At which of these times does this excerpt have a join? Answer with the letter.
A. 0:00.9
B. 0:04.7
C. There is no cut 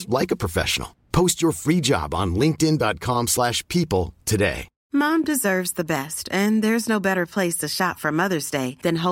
B